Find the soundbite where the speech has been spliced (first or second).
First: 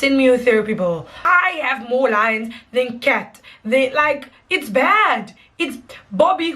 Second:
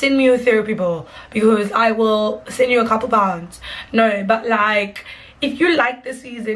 first